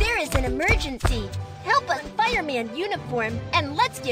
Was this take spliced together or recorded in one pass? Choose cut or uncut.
cut